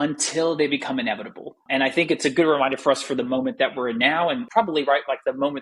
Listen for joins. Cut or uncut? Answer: uncut